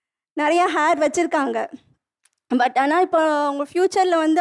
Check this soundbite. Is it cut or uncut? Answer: uncut